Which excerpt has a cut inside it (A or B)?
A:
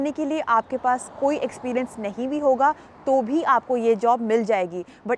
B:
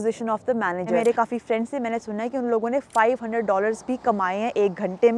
B